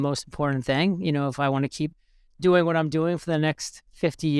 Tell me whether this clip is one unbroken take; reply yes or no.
yes